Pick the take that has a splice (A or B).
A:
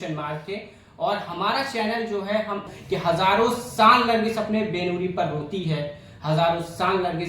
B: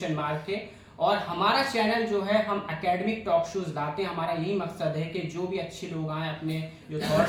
A